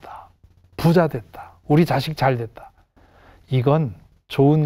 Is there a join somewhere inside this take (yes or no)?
no